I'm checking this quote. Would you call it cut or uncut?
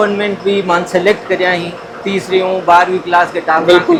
uncut